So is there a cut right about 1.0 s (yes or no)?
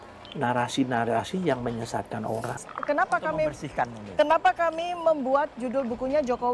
no